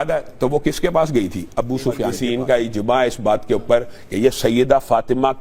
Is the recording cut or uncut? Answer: cut